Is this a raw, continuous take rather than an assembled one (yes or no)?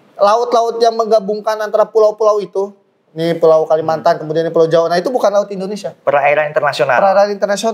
yes